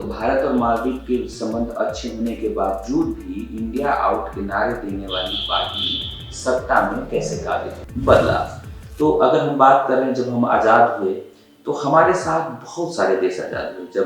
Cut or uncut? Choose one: cut